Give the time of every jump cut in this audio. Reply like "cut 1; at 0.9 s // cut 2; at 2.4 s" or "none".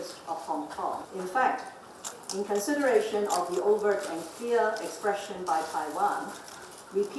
cut 1; at 1.1 s